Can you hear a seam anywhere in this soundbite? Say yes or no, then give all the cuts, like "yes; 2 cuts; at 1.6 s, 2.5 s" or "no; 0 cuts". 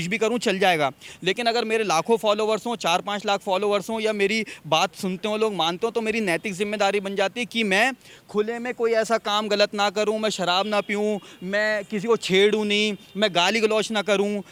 no; 0 cuts